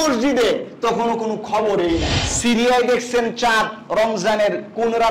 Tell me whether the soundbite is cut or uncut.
cut